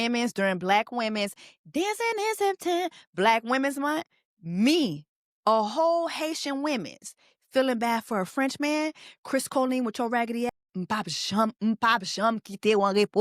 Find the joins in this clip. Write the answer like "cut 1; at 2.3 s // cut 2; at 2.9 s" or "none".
none